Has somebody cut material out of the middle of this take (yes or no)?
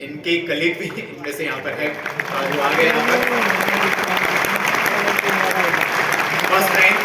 no